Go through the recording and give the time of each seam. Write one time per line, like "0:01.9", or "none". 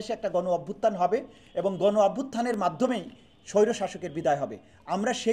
none